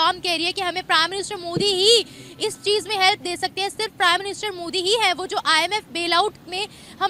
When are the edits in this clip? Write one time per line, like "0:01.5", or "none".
none